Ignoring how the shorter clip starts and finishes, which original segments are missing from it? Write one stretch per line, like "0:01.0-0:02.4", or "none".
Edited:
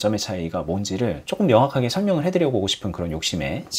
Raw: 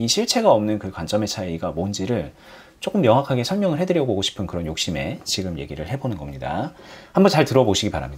0:02.3-0:02.8

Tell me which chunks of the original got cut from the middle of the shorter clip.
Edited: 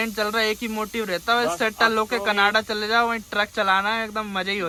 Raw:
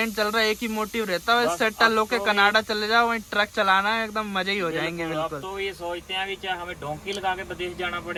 none

